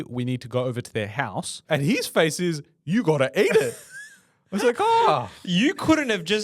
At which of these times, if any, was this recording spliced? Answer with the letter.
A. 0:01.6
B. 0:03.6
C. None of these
A